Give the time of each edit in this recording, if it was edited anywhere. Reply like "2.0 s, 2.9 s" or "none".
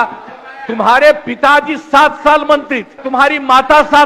3.0 s